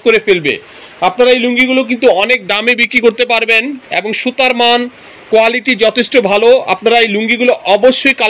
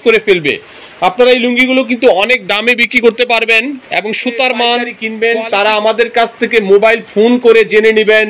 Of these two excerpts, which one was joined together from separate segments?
second; 1 cut; at 5.0 s

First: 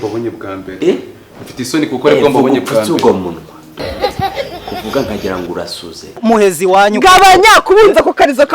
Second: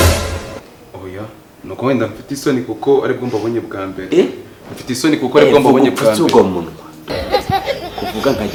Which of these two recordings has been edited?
first; 1 cut; at 6.2 s

